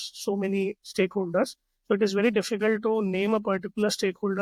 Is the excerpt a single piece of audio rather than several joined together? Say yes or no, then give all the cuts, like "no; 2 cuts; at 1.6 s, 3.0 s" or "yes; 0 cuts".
yes; 0 cuts